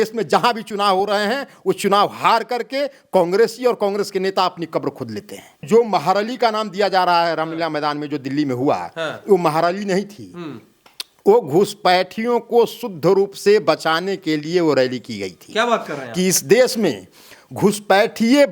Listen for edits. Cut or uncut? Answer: cut